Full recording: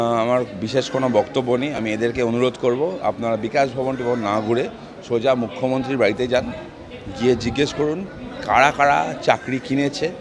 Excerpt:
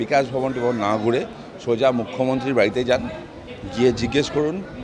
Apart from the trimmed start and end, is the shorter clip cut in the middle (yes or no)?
no